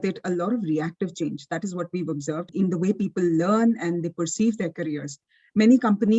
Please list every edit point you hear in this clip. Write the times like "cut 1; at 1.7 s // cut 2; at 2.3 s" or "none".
cut 1; at 2.5 s